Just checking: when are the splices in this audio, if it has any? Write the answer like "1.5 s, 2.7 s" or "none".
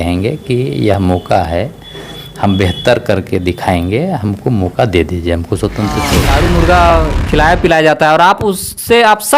6.2 s